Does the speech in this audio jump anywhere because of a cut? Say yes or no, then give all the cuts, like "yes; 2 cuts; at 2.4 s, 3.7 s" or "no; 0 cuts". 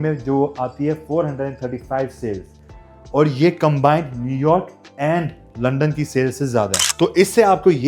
no; 0 cuts